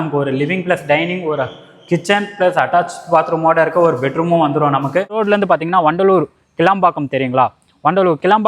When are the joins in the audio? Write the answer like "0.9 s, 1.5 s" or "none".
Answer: 5.2 s